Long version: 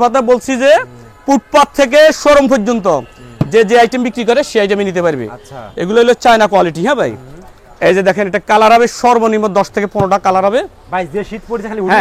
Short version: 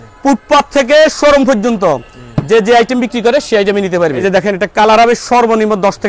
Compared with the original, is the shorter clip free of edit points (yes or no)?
no